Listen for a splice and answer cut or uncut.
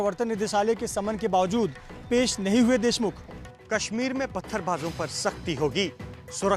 cut